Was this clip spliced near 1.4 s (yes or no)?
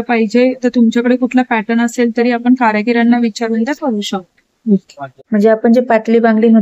no